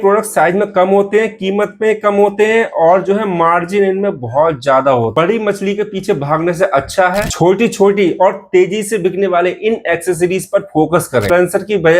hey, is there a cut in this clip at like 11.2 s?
yes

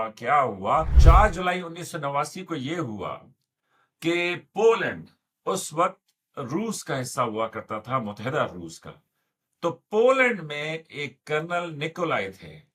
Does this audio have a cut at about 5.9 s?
no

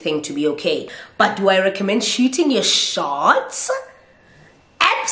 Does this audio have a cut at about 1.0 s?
yes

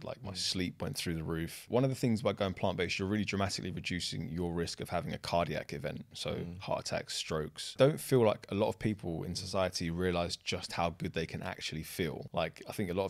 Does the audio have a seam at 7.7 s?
yes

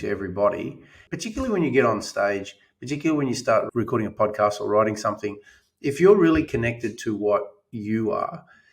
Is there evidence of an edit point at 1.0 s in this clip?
yes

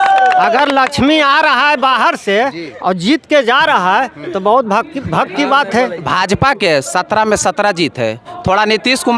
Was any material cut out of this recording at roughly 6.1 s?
yes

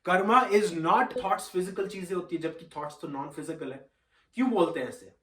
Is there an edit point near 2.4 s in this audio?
no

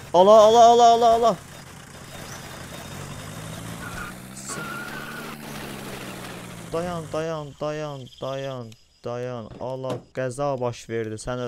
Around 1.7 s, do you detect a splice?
no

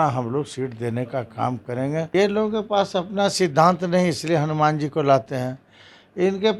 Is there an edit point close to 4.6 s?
no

